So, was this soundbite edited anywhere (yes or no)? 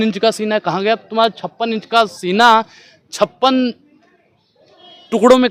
no